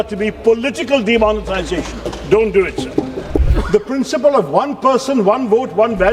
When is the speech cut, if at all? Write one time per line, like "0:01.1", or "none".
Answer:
0:03.5